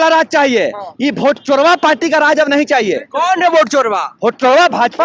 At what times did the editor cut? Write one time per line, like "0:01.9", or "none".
none